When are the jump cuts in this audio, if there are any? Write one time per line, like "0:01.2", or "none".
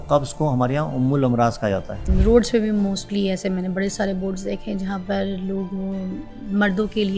0:02.1